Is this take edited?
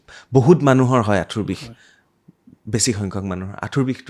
no; 0 cuts

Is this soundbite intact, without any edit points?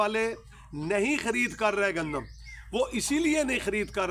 yes; 0 cuts

